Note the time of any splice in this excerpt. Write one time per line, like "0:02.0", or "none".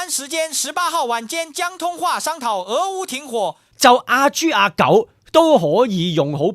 0:03.6